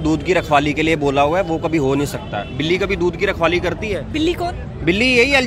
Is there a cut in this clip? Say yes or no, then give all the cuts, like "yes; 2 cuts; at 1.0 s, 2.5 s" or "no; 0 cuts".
no; 0 cuts